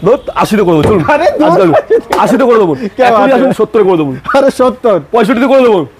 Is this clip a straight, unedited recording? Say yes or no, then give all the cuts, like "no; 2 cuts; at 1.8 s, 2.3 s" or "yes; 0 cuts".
yes; 0 cuts